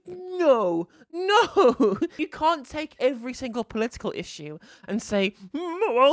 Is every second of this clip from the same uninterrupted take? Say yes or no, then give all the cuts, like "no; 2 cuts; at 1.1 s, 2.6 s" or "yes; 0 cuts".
no; 1 cut; at 2.3 s